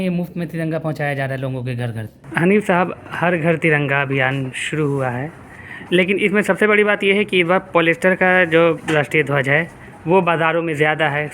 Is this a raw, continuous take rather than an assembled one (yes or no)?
no